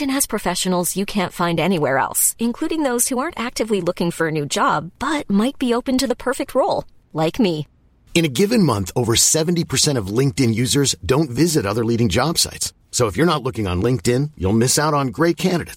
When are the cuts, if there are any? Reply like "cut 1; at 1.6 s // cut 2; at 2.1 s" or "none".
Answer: none